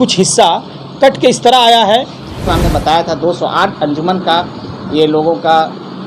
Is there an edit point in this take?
yes; 1 cut; at 2.5 s

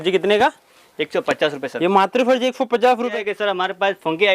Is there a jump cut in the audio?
yes; 1 cut; at 3.1 s

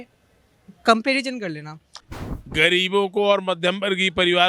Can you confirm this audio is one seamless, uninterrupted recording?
no; 1 cut; at 2.0 s

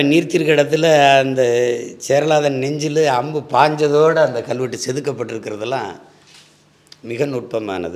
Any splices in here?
no; 0 cuts

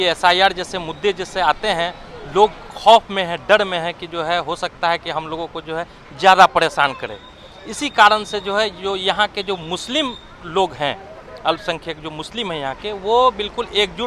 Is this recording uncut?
yes; 0 cuts

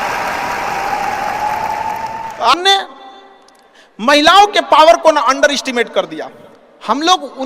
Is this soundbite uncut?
yes; 0 cuts

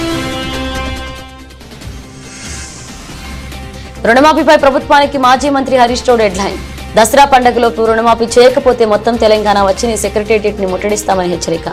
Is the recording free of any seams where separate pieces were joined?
yes; 0 cuts

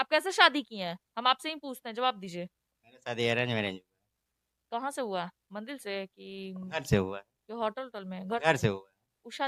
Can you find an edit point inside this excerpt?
no; 0 cuts

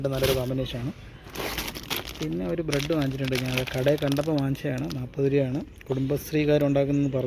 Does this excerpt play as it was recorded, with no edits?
yes; 0 cuts

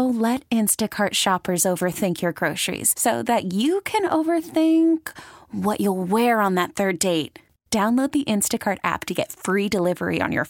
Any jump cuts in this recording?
no; 0 cuts

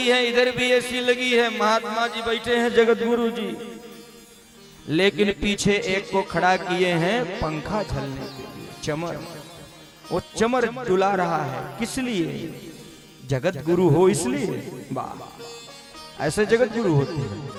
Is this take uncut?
yes; 0 cuts

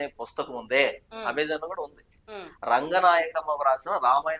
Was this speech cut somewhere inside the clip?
no; 0 cuts

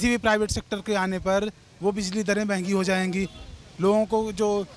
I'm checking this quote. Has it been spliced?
no; 0 cuts

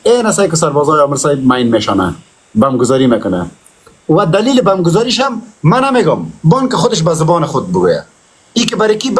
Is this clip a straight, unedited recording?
yes; 0 cuts

